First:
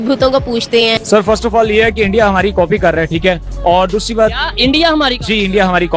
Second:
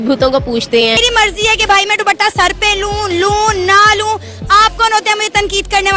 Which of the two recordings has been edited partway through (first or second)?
second